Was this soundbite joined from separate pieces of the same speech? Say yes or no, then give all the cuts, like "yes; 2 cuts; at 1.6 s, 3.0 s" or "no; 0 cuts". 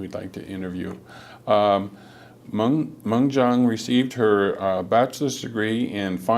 yes; 1 cut; at 2.9 s